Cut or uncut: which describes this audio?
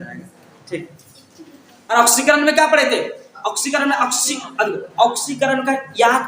cut